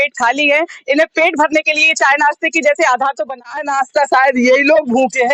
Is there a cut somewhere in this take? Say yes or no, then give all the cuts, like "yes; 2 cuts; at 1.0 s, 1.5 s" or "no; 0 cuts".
yes; 1 cut; at 3.3 s